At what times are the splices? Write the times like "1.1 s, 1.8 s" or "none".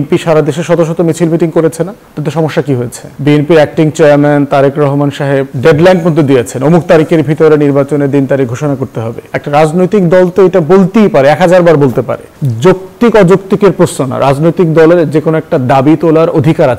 3.0 s, 9.2 s, 12.3 s